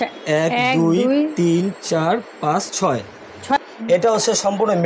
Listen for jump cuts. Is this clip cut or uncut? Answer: cut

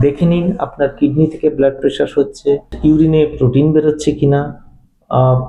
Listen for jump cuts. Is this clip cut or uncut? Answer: cut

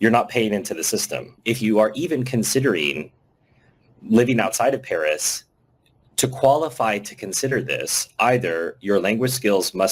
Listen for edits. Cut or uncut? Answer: cut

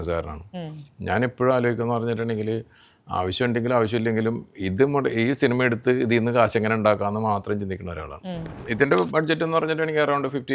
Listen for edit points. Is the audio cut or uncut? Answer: cut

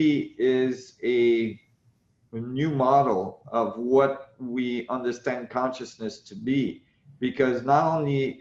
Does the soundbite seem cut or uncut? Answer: uncut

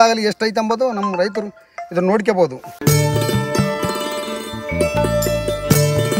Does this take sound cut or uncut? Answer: cut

